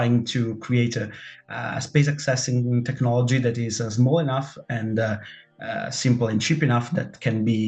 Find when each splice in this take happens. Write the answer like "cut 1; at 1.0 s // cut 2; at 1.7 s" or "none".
none